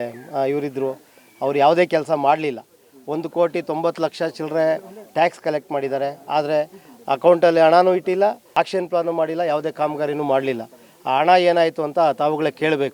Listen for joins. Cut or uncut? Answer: cut